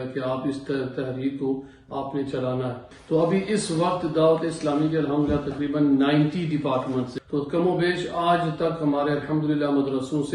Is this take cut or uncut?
cut